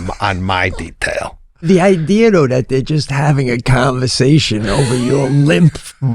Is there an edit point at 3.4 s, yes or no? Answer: no